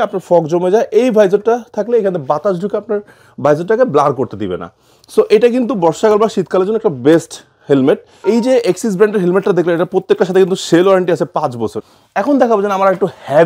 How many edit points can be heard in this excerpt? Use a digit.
2